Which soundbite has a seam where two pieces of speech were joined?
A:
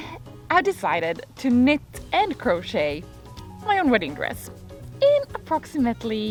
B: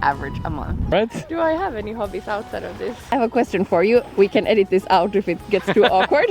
B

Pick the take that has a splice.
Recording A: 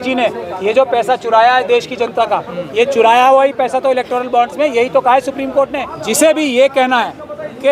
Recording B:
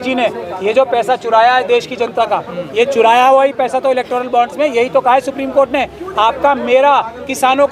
A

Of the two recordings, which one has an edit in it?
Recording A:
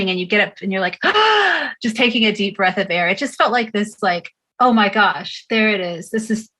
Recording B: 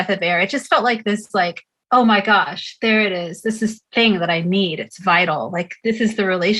B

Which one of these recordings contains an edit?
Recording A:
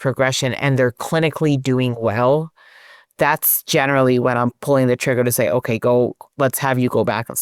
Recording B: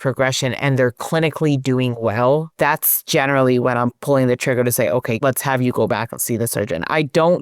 B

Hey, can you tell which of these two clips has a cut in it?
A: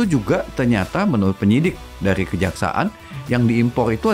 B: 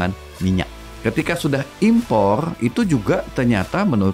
B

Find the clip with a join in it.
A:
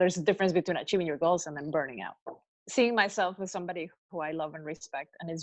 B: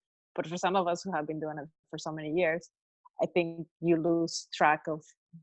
A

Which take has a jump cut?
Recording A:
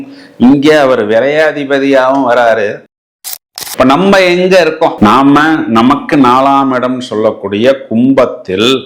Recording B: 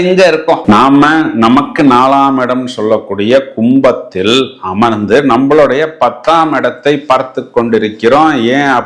A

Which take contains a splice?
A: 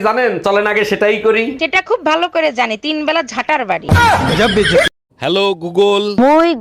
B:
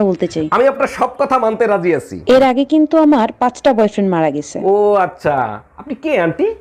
A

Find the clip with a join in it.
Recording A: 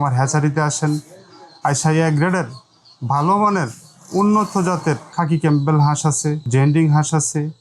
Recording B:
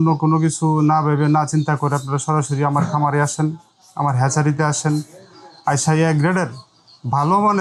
A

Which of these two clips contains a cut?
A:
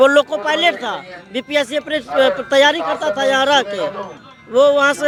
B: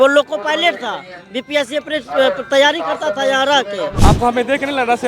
B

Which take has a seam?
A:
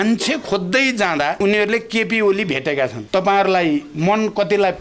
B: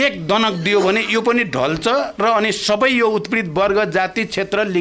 A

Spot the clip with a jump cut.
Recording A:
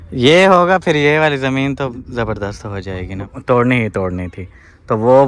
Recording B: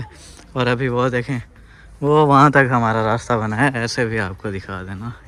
A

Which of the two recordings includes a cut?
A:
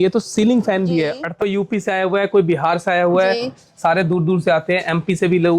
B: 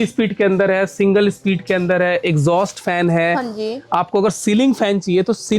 A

